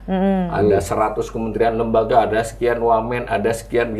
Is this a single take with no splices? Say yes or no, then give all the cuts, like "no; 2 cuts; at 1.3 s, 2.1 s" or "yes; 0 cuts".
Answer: yes; 0 cuts